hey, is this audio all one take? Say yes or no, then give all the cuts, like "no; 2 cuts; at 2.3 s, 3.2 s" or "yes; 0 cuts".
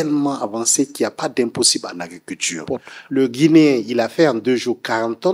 no; 1 cut; at 2.6 s